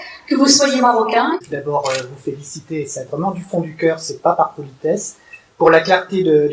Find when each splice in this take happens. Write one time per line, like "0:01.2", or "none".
0:01.3